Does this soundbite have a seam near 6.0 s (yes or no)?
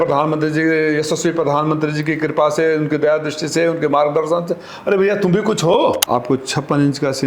yes